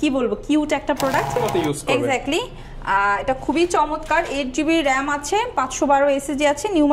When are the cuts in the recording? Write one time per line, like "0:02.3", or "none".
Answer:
0:01.4